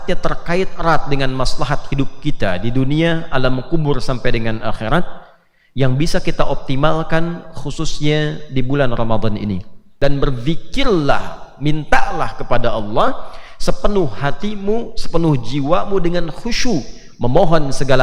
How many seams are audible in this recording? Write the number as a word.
one